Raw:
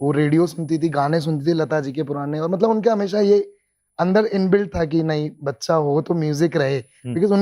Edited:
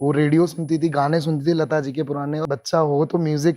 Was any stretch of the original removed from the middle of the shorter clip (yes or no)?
yes